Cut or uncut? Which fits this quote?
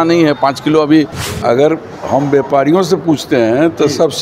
cut